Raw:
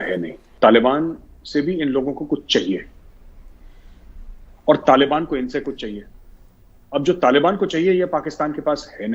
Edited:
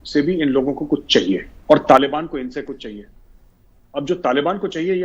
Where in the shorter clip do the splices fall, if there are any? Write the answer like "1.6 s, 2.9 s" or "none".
1.5 s